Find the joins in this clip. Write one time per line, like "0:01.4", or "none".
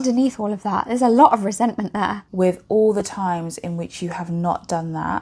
0:02.2